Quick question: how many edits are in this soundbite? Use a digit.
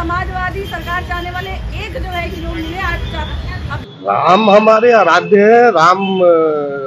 1